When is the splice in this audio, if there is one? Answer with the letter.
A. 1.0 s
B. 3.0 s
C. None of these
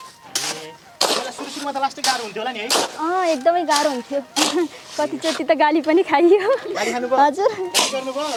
C